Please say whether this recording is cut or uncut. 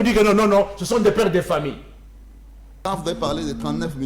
cut